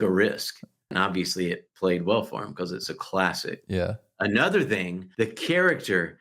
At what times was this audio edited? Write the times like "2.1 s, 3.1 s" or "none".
0.9 s, 5.0 s